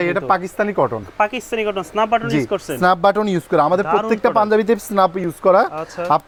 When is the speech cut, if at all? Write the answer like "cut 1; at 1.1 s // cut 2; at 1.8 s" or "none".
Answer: none